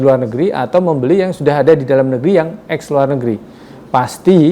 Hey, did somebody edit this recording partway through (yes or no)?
no